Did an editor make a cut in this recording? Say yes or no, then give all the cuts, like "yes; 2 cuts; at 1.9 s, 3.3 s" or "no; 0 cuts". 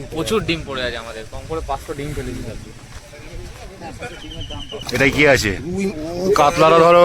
yes; 1 cut; at 4.8 s